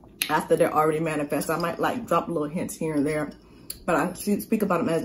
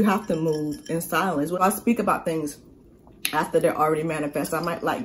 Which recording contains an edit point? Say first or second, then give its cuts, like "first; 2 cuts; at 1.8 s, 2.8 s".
second; 1 cut; at 1.6 s